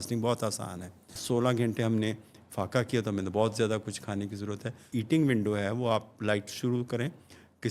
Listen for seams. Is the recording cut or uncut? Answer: cut